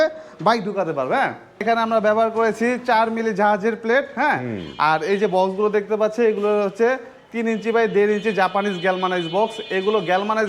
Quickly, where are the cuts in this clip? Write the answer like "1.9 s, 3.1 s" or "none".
1.6 s

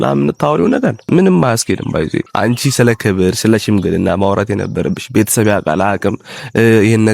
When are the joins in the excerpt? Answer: 1.0 s, 2.3 s

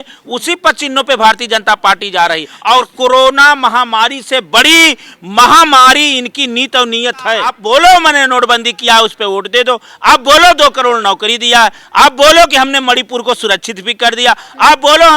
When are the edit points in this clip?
2.5 s, 7.6 s

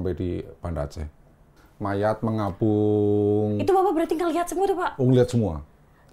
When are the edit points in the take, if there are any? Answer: 1.6 s

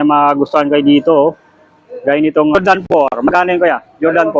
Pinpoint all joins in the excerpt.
2.6 s

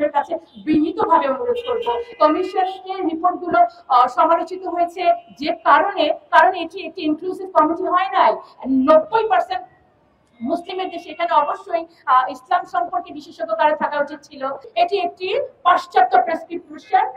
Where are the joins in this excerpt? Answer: 14.7 s

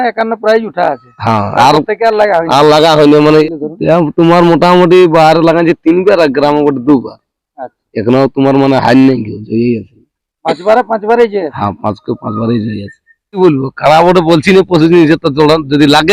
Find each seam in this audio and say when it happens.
3.4 s, 13.4 s

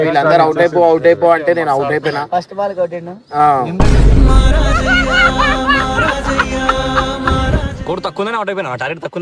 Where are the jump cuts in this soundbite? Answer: 7.8 s

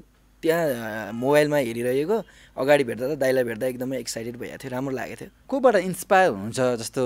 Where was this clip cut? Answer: 5.3 s

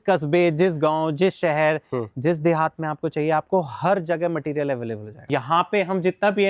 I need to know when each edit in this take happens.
5.3 s

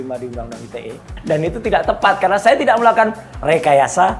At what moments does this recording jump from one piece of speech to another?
1.1 s

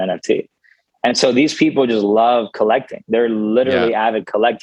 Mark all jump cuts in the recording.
none

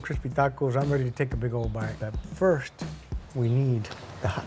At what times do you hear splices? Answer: 2.0 s

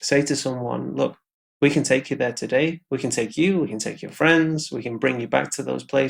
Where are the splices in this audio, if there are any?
none

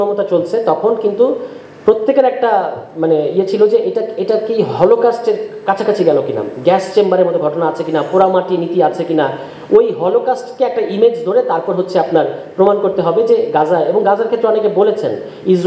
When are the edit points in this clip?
none

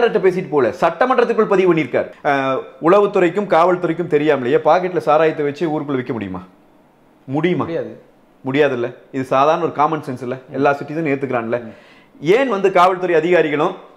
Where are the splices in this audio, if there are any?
2.1 s

